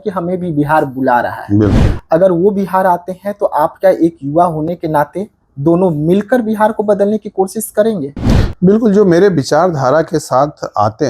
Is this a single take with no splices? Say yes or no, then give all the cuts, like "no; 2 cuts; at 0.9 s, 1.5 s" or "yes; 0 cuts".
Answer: yes; 0 cuts